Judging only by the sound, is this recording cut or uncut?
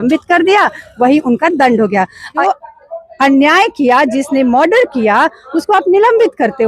cut